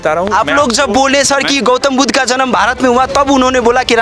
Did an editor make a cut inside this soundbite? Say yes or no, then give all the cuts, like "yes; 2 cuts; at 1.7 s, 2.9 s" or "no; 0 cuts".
no; 0 cuts